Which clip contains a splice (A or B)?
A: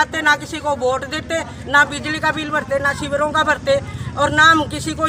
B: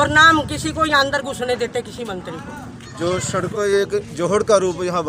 B